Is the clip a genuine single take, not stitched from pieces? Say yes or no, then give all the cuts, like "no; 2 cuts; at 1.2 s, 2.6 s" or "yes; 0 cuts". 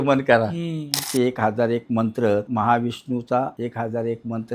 no; 3 cuts; at 0.9 s, 2.5 s, 3.5 s